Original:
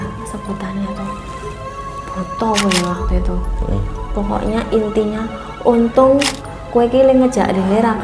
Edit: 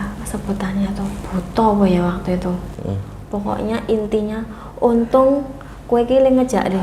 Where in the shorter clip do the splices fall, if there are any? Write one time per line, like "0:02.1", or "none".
0:01.2